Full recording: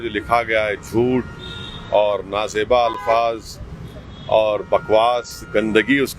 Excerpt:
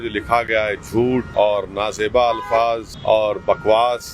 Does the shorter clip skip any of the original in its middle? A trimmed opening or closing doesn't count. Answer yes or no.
yes